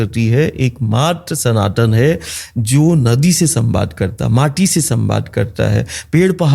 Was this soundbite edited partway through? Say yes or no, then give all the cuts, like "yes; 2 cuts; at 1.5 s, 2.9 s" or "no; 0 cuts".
no; 0 cuts